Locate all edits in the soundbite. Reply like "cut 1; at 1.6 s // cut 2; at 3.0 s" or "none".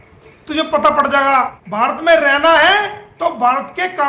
cut 1; at 1.6 s